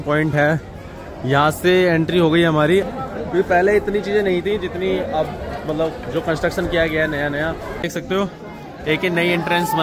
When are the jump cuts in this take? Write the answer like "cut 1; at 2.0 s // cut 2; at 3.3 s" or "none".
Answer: cut 1; at 2.8 s // cut 2; at 7.8 s